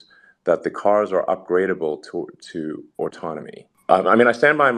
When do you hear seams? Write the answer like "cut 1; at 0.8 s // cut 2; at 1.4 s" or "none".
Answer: cut 1; at 3.7 s